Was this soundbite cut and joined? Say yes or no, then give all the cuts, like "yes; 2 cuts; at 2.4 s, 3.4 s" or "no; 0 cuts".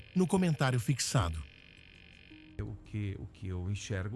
yes; 1 cut; at 2.6 s